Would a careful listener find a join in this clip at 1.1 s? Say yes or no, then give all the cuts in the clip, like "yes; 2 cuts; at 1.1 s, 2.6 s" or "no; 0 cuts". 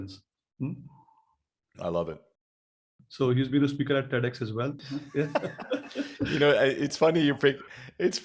no; 2 cuts; at 2.5 s, 4.8 s